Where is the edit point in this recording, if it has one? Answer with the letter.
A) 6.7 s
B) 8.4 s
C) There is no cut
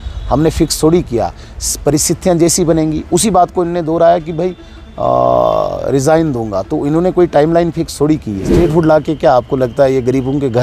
B